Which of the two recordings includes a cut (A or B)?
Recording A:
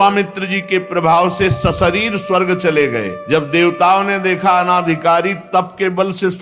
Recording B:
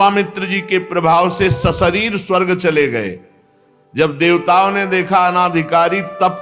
A